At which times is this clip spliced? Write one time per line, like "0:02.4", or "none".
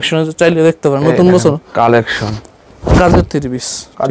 0:02.7